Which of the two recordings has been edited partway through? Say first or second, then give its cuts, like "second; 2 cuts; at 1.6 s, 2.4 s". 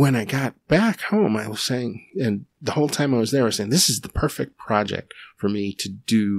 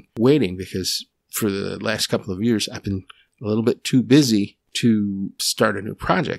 second; 3 cuts; at 1.0 s, 4.6 s, 5.4 s